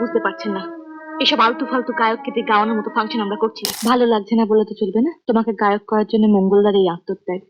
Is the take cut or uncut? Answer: cut